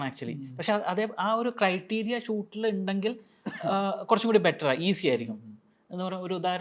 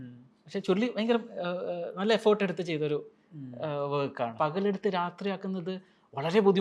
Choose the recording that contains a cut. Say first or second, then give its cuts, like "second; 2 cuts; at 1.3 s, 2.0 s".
second; 1 cut; at 4.3 s